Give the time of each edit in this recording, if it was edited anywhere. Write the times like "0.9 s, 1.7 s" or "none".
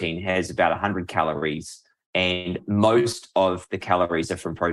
2.6 s